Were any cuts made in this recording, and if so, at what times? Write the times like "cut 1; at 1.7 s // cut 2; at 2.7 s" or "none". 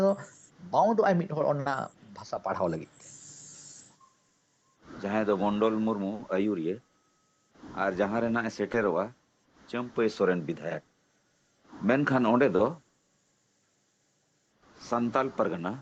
cut 1; at 4.0 s